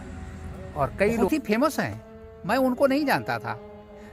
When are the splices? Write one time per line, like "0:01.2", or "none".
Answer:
0:01.3